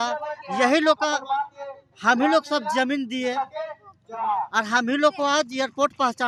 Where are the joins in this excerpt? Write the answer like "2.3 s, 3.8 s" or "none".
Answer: none